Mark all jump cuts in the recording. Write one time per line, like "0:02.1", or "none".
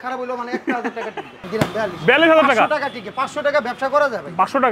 0:01.5